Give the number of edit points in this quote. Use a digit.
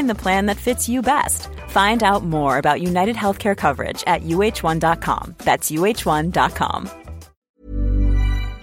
1